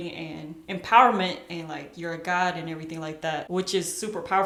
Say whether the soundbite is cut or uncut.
uncut